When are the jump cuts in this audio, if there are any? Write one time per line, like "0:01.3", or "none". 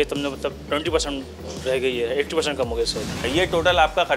0:03.2